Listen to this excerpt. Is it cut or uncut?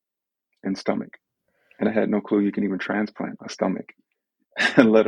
cut